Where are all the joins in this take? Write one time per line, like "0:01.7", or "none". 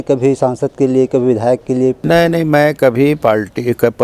0:02.0